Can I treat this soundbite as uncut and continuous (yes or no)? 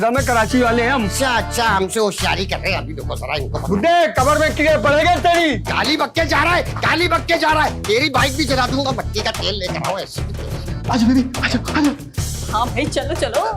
yes